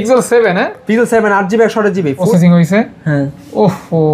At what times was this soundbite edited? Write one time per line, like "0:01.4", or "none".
0:02.3